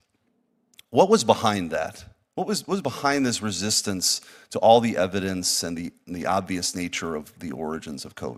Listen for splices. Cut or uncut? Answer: uncut